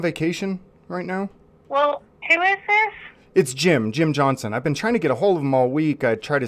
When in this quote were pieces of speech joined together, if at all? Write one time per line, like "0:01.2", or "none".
none